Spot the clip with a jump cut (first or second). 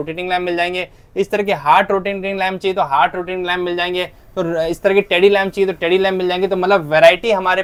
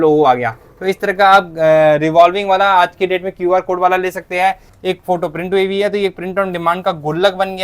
second